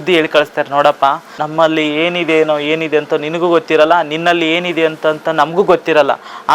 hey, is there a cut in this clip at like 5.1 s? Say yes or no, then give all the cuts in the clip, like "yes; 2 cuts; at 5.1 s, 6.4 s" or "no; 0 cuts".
no; 1 cut; at 1.4 s